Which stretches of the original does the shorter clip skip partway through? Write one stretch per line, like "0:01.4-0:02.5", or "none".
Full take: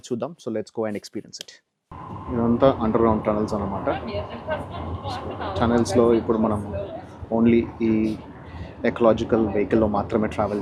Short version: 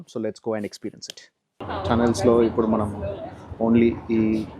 0:01.9-0:05.3